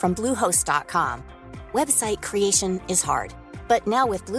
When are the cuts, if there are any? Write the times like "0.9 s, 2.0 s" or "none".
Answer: none